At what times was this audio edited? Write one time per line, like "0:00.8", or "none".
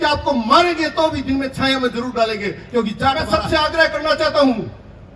0:03.2

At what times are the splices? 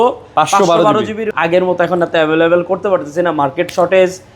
0:01.3

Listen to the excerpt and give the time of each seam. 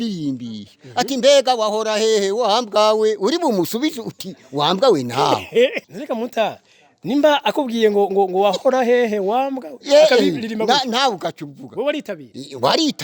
0:05.9

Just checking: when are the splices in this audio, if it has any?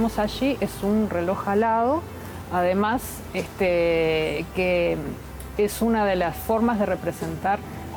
none

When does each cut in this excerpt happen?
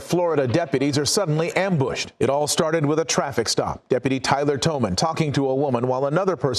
0:01.9

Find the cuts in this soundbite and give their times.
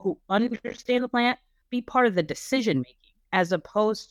0:01.5

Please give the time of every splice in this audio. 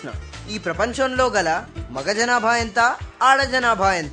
none

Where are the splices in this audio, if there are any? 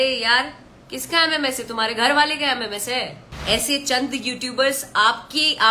0:03.3

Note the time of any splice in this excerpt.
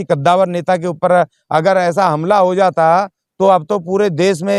none

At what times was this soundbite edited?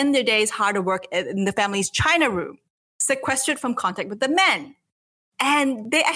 0:01.5

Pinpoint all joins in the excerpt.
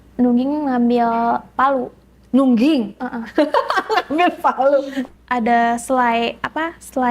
0:05.0

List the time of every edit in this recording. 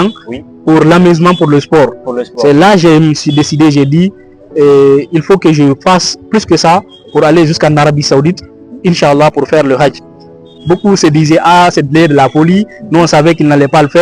0:10.5

